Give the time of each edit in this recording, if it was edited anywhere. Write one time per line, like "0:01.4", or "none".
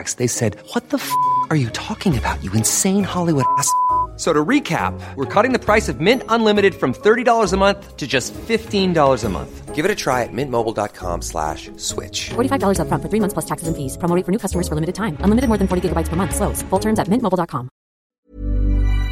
0:18.0